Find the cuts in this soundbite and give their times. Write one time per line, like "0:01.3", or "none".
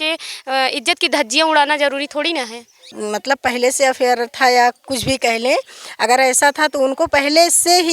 0:02.9